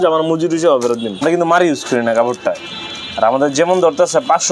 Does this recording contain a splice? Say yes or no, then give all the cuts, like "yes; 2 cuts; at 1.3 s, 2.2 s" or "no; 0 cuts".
yes; 1 cut; at 1.2 s